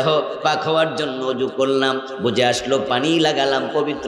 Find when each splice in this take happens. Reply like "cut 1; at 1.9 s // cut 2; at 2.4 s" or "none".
none